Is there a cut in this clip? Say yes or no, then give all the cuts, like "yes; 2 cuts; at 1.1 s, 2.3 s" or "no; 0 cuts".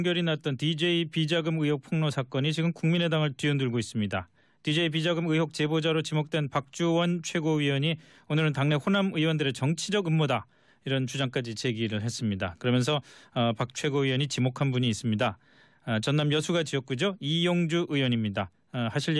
no; 0 cuts